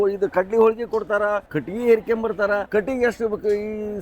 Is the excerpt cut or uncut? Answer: cut